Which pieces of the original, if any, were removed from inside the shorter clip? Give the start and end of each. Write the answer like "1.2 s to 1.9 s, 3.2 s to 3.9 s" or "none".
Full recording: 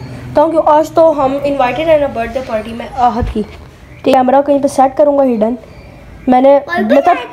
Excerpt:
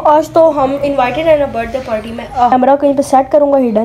3.1 s to 4.2 s